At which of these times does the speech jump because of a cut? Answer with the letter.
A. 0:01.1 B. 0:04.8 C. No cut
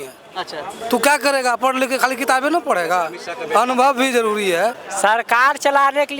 B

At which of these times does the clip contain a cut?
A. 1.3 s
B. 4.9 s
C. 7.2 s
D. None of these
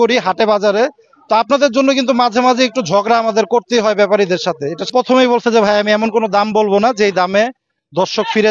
B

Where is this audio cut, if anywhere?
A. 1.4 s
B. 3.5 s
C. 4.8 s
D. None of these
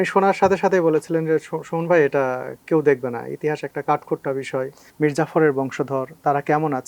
C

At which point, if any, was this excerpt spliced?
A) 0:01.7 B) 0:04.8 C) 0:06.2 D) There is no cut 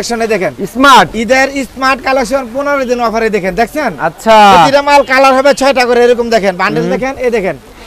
D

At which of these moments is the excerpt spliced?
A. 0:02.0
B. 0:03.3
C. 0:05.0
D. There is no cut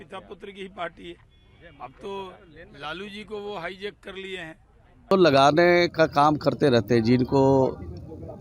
C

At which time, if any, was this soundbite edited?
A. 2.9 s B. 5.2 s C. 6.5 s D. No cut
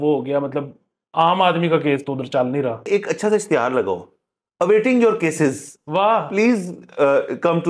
A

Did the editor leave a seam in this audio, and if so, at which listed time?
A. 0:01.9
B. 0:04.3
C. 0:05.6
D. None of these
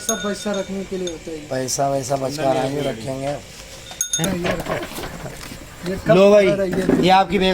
B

